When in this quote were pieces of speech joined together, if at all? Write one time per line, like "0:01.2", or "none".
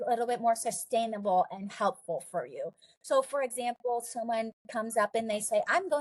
none